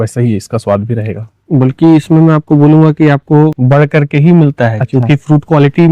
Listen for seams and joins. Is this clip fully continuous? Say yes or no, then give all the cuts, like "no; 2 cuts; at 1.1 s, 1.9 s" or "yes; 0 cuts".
no; 1 cut; at 3.6 s